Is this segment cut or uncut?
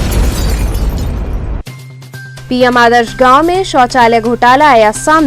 uncut